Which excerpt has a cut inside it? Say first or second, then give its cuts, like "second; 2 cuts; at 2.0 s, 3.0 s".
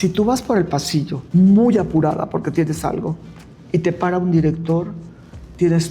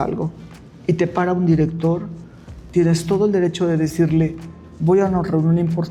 first; 1 cut; at 1.2 s